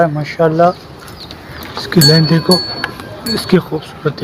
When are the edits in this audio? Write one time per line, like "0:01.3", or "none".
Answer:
none